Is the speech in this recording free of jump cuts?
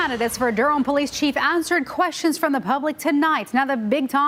yes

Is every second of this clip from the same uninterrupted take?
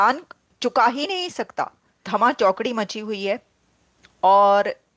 no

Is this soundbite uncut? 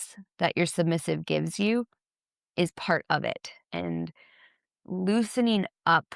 no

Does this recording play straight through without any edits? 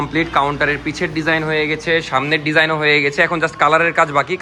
yes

